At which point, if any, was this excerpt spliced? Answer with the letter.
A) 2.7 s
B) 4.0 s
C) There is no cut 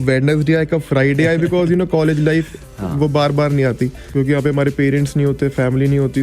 B